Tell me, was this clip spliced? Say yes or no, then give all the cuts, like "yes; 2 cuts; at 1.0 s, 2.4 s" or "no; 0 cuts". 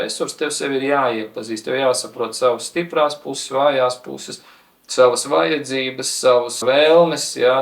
no; 0 cuts